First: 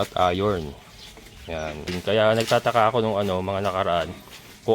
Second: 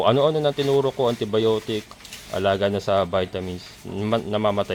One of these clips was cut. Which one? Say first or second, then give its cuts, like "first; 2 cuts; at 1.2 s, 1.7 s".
first; 1 cut; at 1.9 s